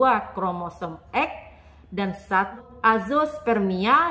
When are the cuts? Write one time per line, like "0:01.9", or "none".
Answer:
0:02.6